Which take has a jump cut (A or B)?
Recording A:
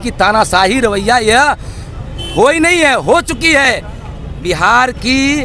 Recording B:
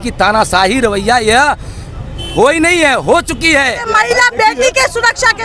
B